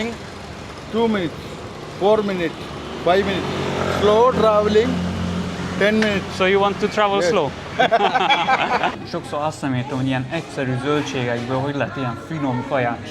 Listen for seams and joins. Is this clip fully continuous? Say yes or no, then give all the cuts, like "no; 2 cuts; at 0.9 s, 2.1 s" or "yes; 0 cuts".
no; 1 cut; at 9.0 s